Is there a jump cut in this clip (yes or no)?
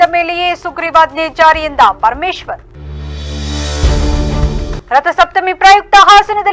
no